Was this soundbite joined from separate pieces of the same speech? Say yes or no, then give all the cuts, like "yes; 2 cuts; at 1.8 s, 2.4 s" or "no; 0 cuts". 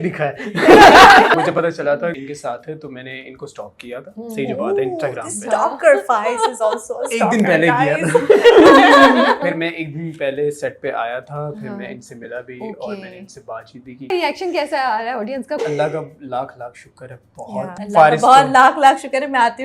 yes; 6 cuts; at 1.3 s, 2.2 s, 9.4 s, 14.1 s, 15.6 s, 17.8 s